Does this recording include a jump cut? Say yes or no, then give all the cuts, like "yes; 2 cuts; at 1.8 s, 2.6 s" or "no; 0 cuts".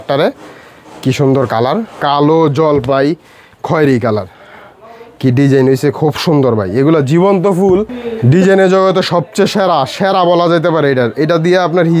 yes; 2 cuts; at 1.9 s, 7.9 s